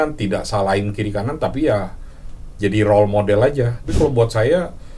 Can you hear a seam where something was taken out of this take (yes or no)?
yes